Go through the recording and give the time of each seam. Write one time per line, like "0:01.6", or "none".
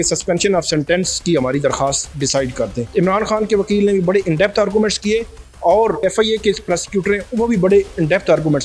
0:02.8
0:06.0